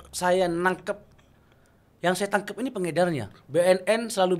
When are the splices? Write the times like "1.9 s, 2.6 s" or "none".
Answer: 3.3 s